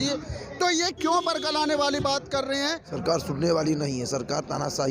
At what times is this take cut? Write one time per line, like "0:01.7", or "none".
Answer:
0:03.0